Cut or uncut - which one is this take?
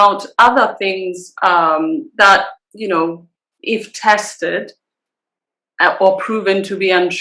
uncut